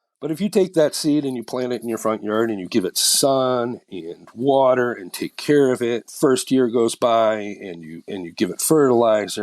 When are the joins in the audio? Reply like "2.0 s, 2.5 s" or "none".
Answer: 6.1 s